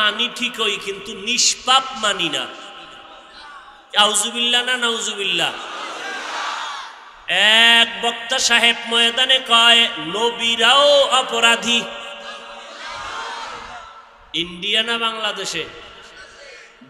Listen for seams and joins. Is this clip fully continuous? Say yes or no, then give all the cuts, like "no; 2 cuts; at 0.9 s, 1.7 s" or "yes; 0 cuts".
no; 1 cut; at 7.2 s